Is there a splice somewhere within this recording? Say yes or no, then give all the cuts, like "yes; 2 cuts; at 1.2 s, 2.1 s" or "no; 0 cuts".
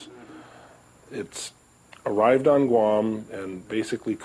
no; 0 cuts